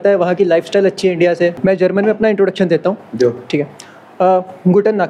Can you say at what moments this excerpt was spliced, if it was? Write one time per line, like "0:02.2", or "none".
0:01.6